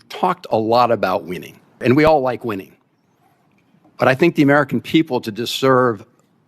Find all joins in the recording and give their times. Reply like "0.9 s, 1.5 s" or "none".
1.8 s